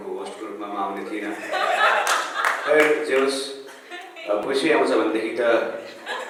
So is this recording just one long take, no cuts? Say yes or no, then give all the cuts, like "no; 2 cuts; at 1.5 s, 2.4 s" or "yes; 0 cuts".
yes; 0 cuts